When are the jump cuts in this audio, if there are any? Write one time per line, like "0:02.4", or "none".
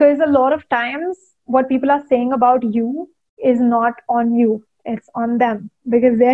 none